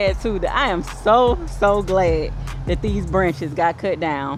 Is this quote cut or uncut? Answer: uncut